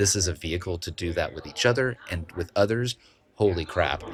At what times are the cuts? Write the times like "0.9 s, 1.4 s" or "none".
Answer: none